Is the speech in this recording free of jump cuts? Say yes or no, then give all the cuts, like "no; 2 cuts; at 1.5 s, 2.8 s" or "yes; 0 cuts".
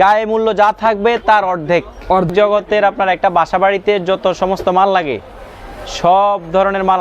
no; 1 cut; at 2.3 s